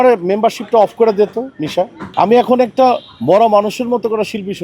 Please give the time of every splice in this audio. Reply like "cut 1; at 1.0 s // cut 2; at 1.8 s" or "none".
cut 1; at 2.0 s